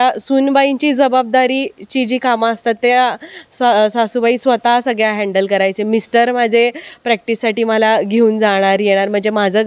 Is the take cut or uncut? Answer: uncut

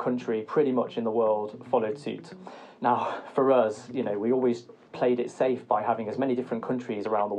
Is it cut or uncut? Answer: cut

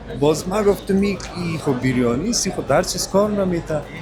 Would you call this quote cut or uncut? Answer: uncut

